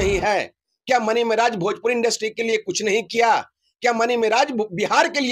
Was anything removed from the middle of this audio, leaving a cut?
no; 0 cuts

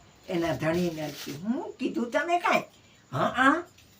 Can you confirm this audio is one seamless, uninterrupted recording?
yes; 0 cuts

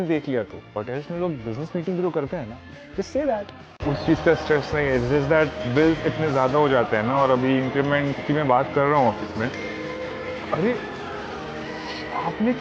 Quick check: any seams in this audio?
yes; 2 cuts; at 6.9 s, 11.4 s

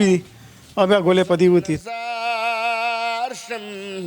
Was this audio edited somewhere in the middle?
yes; 1 cut; at 1.8 s

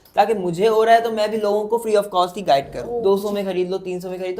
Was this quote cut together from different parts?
yes; 1 cut; at 3.0 s

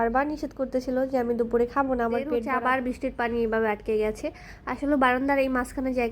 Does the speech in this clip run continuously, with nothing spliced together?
no; 1 cut; at 2.6 s

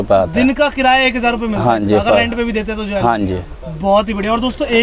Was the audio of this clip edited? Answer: no; 0 cuts

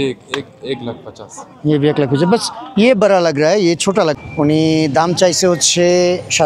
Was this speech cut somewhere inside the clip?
yes; 1 cut; at 4.1 s

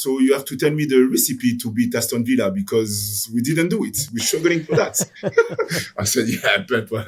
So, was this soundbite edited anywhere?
no; 0 cuts

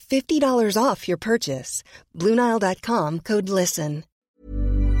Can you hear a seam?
yes; 1 cut; at 4.1 s

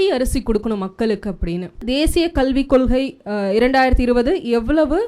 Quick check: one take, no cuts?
no; 1 cut; at 1.8 s

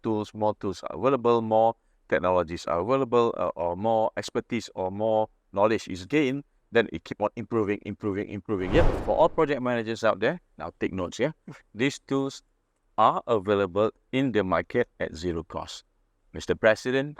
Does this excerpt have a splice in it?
yes; 1 cut; at 9.0 s

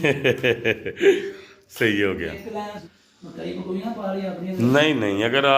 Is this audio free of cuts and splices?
no; 1 cut; at 2.8 s

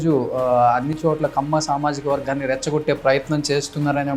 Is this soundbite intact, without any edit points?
yes; 0 cuts

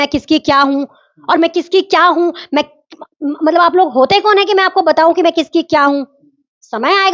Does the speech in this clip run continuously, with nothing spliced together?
yes; 0 cuts

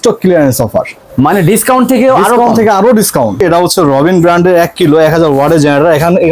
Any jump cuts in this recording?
yes; 1 cut; at 3.4 s

